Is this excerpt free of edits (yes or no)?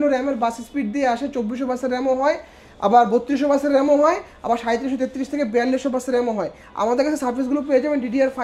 yes